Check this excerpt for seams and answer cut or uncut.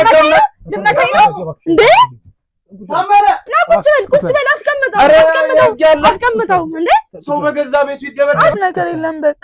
cut